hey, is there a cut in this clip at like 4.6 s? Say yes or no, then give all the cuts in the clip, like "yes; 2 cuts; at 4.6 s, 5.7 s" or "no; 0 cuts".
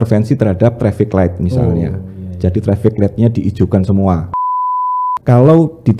yes; 1 cut; at 4.6 s